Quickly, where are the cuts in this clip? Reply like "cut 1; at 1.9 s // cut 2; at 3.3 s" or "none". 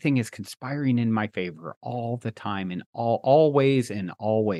none

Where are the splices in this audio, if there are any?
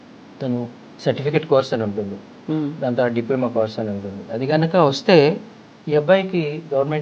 none

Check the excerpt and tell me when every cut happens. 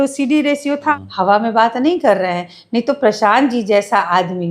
cut 1; at 0.9 s

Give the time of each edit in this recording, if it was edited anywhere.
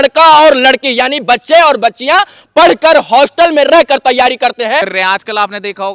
cut 1; at 4.9 s

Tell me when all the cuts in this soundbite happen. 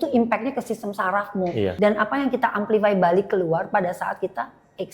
cut 1; at 1.7 s

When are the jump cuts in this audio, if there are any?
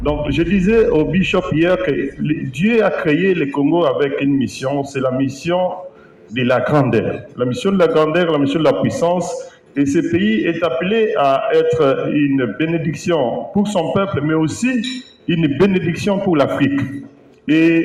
none

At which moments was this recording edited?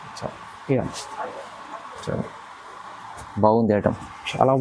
none

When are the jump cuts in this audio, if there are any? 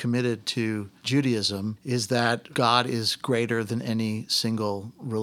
cut 1; at 0.9 s // cut 2; at 1.8 s // cut 3; at 2.5 s

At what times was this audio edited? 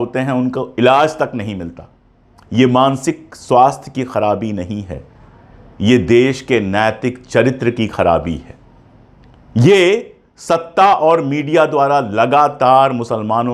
none

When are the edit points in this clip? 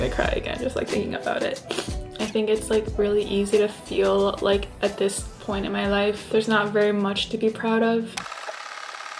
cut 1; at 1.9 s // cut 2; at 8.2 s

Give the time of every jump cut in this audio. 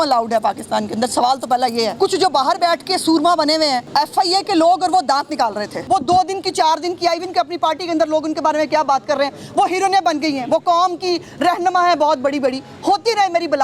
cut 1; at 1.9 s // cut 2; at 3.9 s // cut 3; at 5.8 s

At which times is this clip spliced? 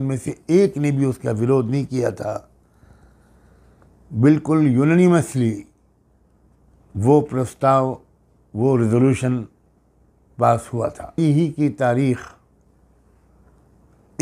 cut 1; at 11.2 s

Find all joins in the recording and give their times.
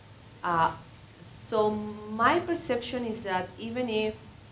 none

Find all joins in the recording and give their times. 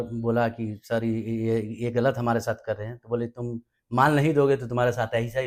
none

